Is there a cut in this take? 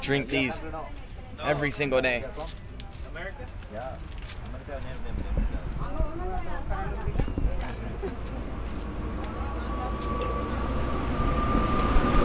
no; 0 cuts

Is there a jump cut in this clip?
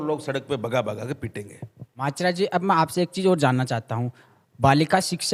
no; 0 cuts

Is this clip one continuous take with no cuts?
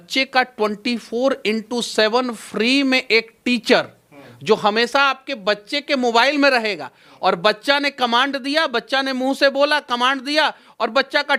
yes; 0 cuts

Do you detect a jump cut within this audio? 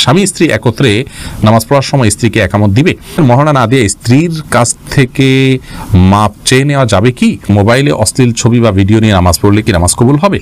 yes; 2 cuts; at 3.2 s, 7.5 s

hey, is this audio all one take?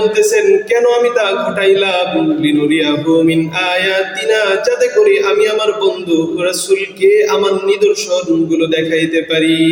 yes; 0 cuts

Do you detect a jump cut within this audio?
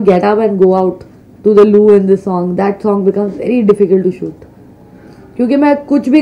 no; 0 cuts

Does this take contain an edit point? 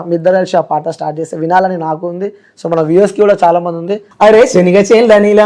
yes; 1 cut; at 4.0 s

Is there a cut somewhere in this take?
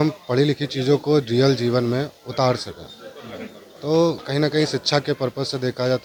no; 0 cuts

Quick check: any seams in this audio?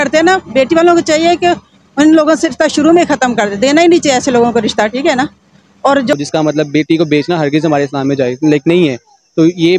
yes; 1 cut; at 6.1 s

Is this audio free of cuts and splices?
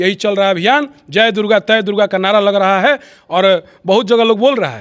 yes; 0 cuts

